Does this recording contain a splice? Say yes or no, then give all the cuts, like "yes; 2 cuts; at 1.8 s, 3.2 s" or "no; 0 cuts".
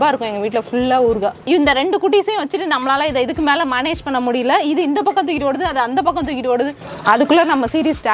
yes; 2 cuts; at 1.4 s, 6.8 s